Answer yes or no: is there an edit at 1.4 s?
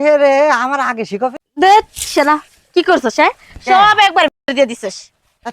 yes